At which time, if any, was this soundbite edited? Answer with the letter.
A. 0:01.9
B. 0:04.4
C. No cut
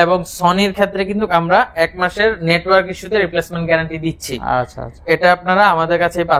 C